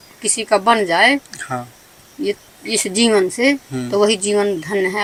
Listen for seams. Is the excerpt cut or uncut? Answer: uncut